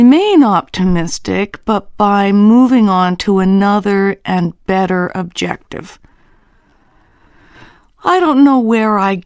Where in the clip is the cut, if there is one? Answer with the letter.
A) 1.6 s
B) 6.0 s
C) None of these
A